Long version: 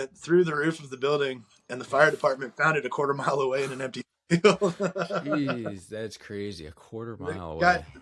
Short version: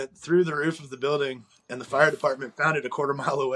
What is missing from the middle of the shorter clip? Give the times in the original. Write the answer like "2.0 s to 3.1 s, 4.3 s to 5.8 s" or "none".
none